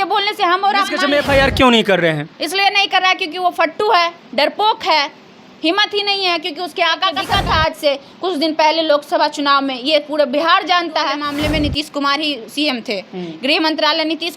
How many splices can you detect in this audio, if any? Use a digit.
3